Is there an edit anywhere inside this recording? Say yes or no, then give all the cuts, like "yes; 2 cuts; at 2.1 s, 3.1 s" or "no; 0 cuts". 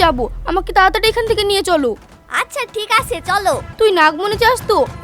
yes; 1 cut; at 3.7 s